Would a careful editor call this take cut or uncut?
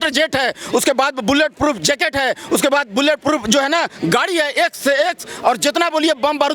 uncut